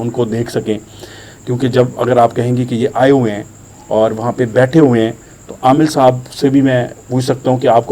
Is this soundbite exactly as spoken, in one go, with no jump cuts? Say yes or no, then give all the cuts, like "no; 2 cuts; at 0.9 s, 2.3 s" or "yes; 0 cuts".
yes; 0 cuts